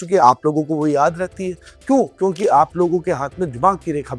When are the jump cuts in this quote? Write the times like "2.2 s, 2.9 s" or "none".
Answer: none